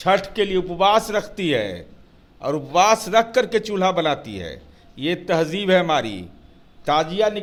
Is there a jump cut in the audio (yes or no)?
no